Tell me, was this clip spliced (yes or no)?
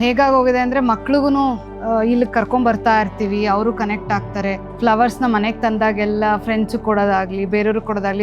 yes